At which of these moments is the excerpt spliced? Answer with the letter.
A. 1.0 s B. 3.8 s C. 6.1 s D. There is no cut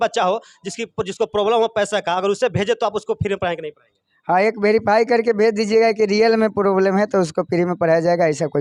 D